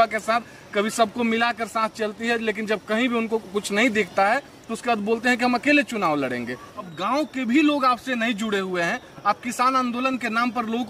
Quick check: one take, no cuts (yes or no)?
no